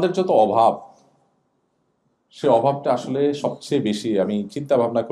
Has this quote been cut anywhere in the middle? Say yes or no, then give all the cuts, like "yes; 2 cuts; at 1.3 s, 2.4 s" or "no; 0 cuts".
no; 0 cuts